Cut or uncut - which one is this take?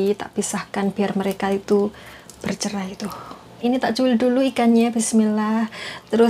cut